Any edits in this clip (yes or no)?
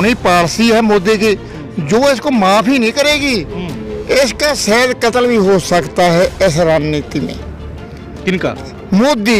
no